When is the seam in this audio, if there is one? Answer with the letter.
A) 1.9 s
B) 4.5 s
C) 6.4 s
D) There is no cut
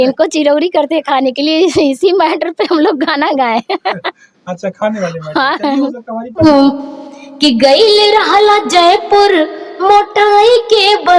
C